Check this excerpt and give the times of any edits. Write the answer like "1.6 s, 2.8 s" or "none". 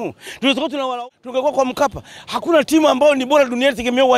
0.9 s